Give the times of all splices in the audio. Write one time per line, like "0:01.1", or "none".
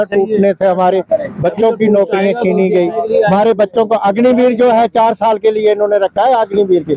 none

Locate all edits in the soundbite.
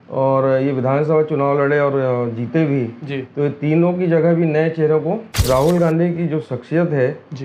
0:05.4

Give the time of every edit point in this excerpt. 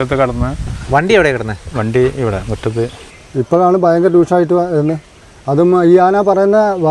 0:03.1

